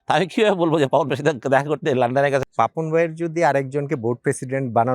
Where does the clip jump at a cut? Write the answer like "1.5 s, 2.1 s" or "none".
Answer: 2.4 s